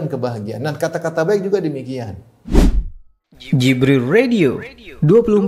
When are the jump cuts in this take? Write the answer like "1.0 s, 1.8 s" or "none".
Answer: 2.4 s